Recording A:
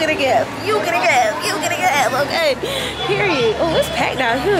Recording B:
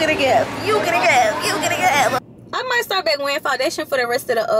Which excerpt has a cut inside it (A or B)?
B